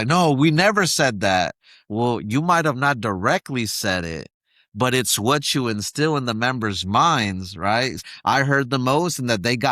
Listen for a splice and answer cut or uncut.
cut